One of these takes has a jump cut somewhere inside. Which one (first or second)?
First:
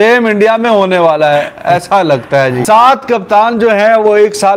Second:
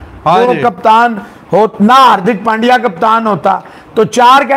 first